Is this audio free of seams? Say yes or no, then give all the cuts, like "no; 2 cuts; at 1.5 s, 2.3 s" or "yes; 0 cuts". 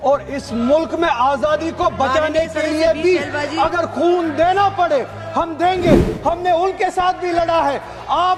yes; 0 cuts